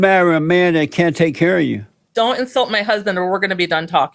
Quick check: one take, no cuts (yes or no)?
no